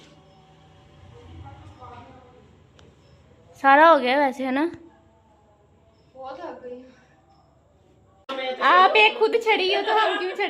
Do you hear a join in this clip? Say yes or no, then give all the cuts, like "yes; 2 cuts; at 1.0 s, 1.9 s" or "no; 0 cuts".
yes; 1 cut; at 8.3 s